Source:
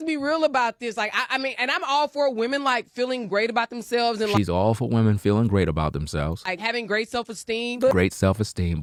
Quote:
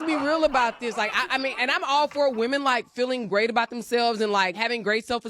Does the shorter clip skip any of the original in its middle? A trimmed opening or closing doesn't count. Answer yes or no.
yes